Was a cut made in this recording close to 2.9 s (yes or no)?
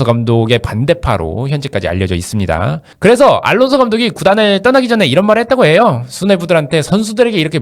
yes